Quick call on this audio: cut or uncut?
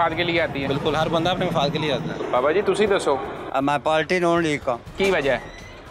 cut